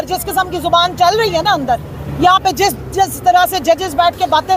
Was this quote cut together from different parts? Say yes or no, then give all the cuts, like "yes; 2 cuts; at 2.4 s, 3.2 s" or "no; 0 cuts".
yes; 1 cut; at 2.0 s